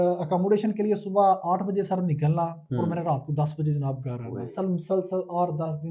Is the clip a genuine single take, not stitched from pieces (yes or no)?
yes